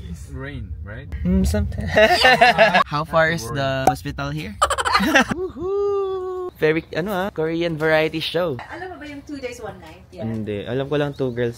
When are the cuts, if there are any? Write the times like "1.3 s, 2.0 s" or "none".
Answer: 1.9 s, 5.3 s, 6.5 s, 10.0 s